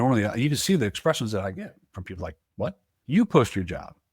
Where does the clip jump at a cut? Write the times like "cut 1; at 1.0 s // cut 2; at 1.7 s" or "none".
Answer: cut 1; at 2.9 s